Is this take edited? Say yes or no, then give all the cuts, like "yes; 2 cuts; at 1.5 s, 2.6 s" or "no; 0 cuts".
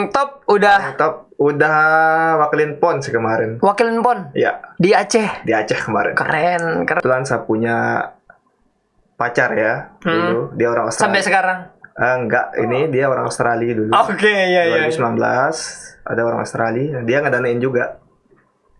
yes; 1 cut; at 7.0 s